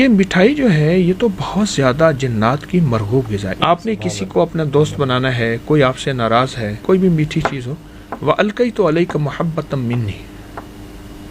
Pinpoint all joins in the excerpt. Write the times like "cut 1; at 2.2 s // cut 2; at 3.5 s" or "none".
cut 1; at 3.5 s // cut 2; at 6.9 s